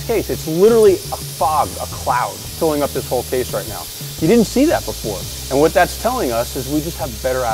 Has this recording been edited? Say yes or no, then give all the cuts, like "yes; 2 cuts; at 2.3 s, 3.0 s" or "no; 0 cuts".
no; 0 cuts